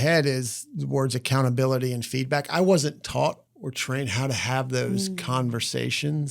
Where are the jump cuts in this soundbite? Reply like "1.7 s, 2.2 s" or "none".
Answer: 3.5 s